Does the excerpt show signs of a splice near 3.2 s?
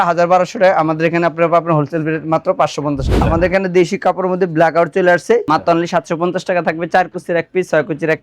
yes; 2 cuts; at 3.2 s, 5.4 s

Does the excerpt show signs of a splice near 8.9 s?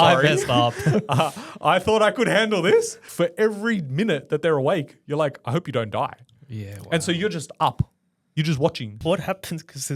yes; 2 cuts; at 3.0 s, 8.9 s

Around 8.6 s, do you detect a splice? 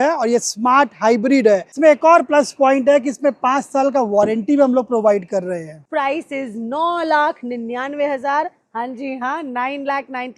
no; 2 cuts; at 1.7 s, 5.8 s

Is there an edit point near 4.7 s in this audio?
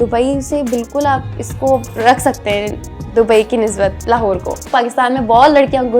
yes; 1 cut; at 4.7 s

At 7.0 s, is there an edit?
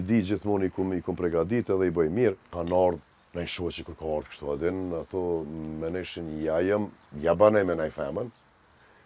no; 1 cut; at 2.5 s

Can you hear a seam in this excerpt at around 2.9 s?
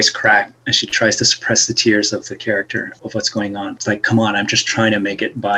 yes; 2 cuts; at 2.9 s, 3.8 s

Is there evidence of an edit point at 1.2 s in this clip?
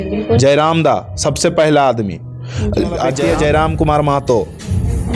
no; 1 cut; at 3.2 s

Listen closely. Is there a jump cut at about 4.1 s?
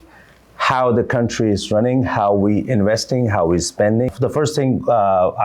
yes; 1 cut; at 4.1 s

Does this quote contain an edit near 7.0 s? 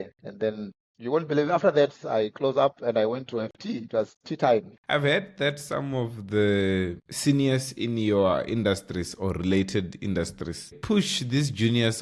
no; 1 cut; at 4.8 s

